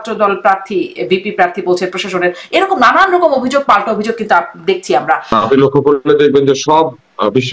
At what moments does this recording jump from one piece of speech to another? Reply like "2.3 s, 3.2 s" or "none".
5.3 s